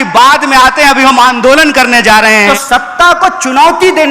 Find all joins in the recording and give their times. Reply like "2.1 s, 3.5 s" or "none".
2.3 s